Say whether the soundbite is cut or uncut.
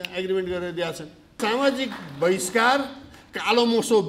cut